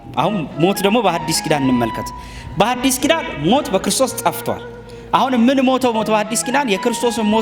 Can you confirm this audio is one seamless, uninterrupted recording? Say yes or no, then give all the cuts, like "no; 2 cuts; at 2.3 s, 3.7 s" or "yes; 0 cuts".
yes; 0 cuts